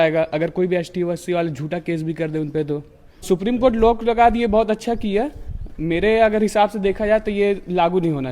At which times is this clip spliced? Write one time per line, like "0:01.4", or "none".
0:03.2